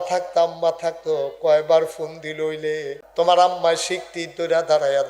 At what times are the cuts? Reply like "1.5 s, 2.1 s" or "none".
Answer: 3.0 s